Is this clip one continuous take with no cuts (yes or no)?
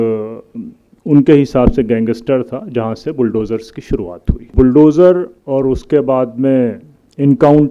no